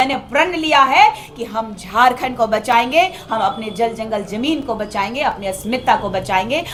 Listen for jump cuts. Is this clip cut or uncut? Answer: uncut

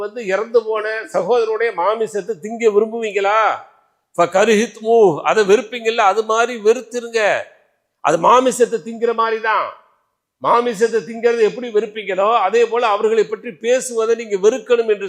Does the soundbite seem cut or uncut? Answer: uncut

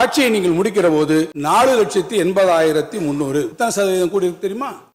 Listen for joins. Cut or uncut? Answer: cut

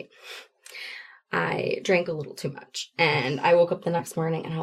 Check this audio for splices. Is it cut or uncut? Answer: uncut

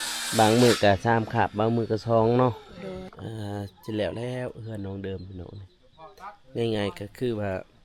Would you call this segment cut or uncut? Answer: cut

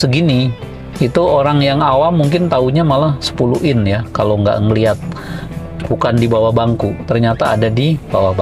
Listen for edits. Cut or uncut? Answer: uncut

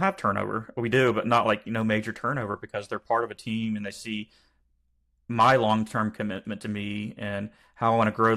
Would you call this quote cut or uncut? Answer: uncut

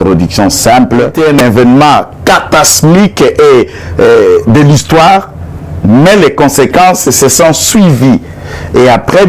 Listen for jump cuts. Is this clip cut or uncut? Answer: cut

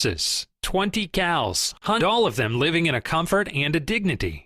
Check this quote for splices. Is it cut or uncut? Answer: cut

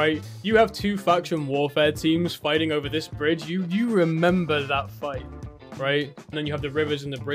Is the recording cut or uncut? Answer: cut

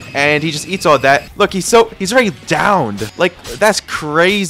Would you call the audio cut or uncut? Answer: cut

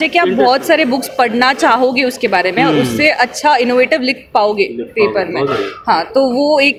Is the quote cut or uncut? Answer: uncut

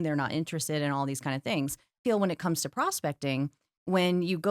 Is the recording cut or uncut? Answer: cut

